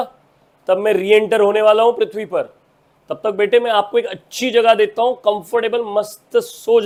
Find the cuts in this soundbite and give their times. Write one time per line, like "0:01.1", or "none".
none